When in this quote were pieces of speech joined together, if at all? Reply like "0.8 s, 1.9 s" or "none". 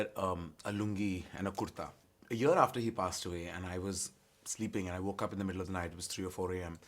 2.0 s